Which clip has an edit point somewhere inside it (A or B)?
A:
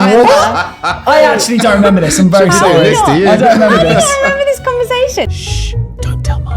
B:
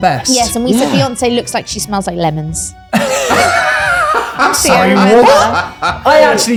A